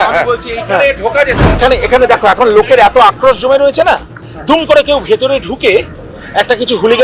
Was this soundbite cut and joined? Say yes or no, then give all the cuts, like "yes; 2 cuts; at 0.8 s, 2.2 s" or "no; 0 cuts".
yes; 1 cut; at 1.6 s